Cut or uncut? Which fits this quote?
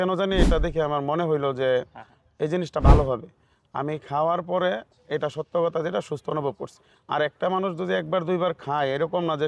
uncut